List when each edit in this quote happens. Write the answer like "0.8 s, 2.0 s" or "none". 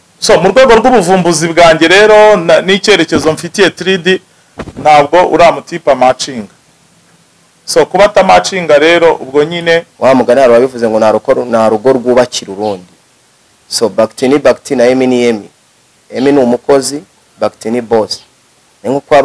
9.9 s